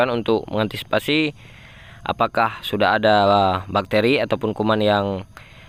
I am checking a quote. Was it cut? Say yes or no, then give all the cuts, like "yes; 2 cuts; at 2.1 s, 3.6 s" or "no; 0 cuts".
no; 0 cuts